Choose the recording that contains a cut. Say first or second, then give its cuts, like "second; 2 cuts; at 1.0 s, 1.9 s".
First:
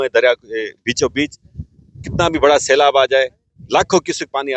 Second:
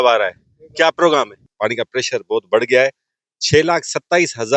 second; 1 cut; at 1.4 s